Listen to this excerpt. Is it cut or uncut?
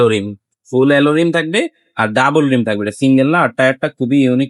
uncut